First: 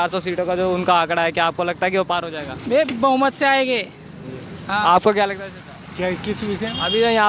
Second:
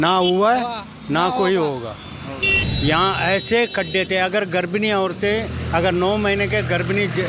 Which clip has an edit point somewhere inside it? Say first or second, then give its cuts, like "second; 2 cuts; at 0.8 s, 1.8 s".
second; 1 cut; at 2.6 s